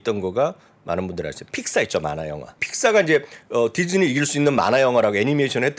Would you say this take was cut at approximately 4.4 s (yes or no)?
no